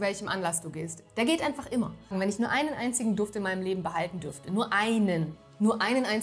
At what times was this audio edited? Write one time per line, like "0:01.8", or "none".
0:02.1